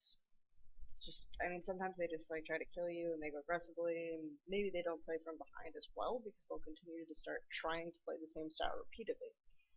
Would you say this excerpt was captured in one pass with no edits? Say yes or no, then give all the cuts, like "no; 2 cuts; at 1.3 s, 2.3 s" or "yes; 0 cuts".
yes; 0 cuts